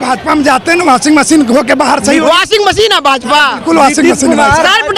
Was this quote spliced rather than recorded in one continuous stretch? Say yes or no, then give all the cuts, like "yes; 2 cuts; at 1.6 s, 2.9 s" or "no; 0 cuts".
no; 0 cuts